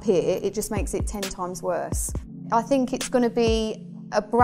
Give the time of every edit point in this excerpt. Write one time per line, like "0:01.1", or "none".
0:02.4